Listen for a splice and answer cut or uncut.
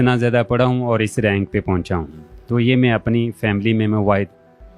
uncut